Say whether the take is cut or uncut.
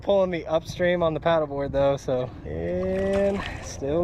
cut